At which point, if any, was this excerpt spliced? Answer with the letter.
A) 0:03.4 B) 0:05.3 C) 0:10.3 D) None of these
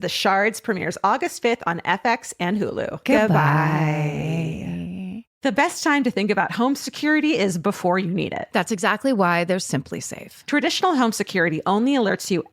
B